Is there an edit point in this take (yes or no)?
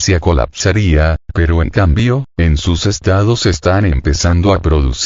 yes